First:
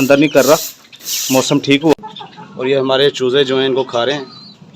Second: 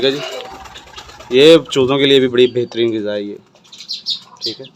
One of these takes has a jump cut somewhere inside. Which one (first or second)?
first